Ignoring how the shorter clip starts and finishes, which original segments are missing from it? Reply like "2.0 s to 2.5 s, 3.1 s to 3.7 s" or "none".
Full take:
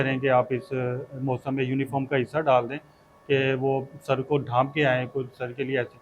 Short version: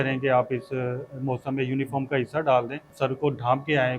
2.9 s to 3.9 s